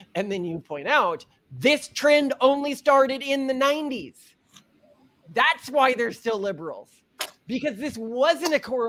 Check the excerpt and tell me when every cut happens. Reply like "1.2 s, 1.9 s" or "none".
none